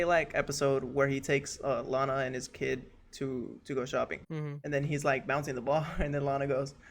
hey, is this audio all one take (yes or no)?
no